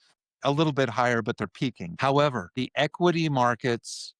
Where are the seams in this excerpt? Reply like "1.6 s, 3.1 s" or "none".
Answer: 1.9 s, 2.5 s